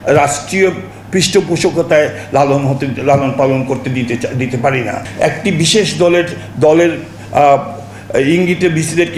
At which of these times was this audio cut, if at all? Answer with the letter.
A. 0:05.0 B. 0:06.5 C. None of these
A